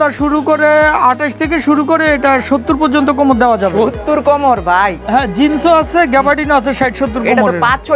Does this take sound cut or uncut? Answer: uncut